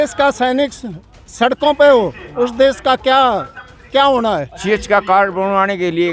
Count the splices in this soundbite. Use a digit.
1